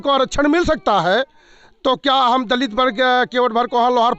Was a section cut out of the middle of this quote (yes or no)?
no